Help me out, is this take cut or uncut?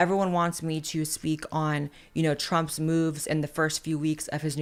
uncut